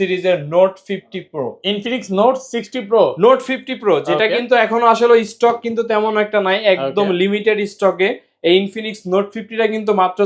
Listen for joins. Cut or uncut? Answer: uncut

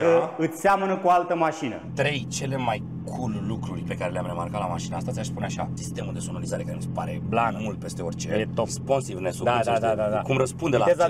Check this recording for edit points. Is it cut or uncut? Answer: cut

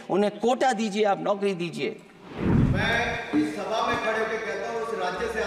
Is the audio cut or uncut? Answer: cut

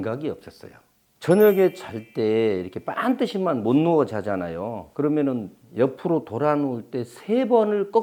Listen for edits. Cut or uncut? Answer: uncut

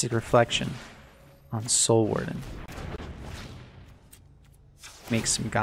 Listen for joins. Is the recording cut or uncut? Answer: uncut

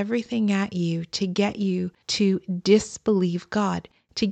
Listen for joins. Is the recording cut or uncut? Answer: cut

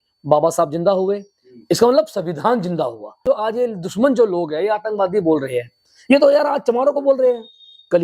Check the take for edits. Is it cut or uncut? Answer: cut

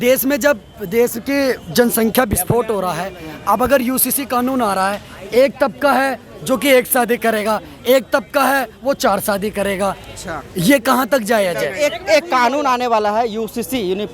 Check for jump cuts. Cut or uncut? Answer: uncut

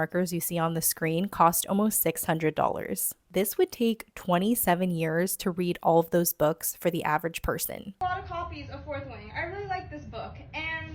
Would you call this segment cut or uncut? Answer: cut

